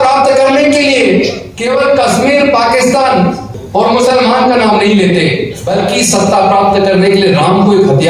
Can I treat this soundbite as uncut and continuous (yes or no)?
no